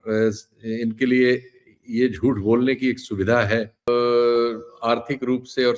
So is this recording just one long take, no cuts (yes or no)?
no